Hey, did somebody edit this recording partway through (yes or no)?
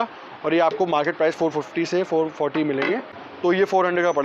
yes